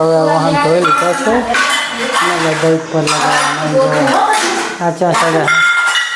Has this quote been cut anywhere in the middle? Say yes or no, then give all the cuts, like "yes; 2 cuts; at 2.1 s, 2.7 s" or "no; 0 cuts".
no; 0 cuts